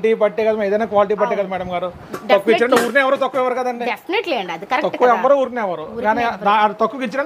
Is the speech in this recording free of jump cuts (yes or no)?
yes